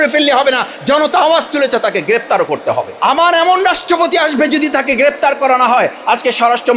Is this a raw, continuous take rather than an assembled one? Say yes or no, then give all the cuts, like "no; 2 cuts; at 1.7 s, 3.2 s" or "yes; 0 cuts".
no; 1 cut; at 2.9 s